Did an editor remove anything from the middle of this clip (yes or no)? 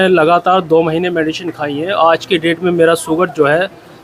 no